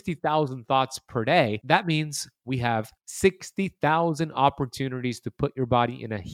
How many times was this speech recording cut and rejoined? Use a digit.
2